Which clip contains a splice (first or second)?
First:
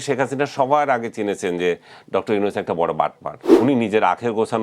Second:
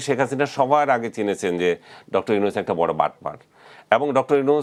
first